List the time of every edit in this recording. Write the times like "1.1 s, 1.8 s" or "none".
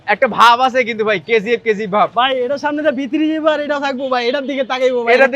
none